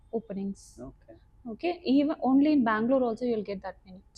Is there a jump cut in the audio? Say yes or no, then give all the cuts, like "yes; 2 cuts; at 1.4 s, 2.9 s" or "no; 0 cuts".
no; 0 cuts